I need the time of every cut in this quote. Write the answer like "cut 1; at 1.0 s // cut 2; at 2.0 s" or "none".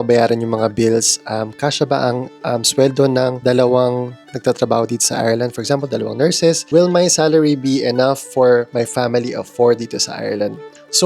cut 1; at 8.7 s